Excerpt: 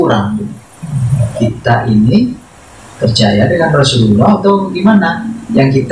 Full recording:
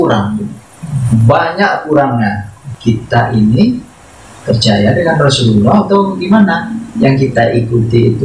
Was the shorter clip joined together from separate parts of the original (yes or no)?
yes